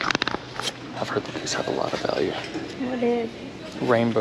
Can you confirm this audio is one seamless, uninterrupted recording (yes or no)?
no